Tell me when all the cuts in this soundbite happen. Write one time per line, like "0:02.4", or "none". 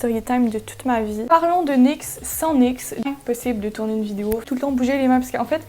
0:01.3
0:03.1
0:04.4